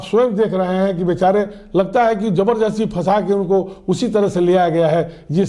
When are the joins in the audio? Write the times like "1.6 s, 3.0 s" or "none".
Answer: none